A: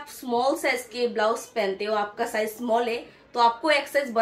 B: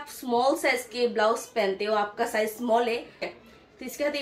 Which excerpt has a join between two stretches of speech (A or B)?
B